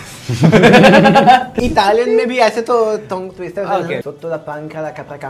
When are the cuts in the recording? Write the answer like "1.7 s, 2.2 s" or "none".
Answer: 1.6 s, 4.0 s

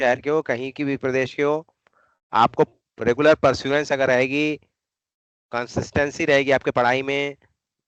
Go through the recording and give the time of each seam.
none

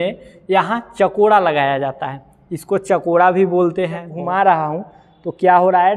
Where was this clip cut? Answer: 4.1 s

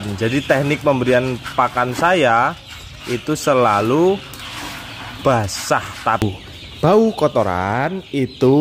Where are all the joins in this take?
6.2 s

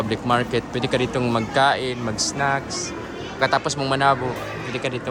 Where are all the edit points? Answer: none

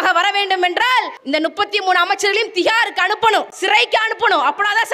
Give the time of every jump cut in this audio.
1.2 s, 3.5 s

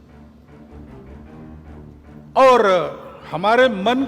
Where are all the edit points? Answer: 1.2 s, 2.2 s

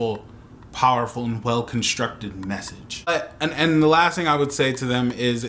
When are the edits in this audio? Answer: 3.2 s

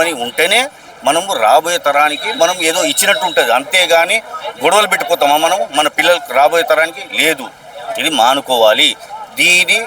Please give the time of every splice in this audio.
none

